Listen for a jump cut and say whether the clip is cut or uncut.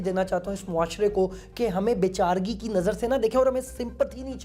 uncut